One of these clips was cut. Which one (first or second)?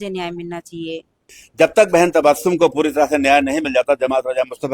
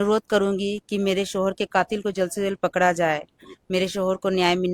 first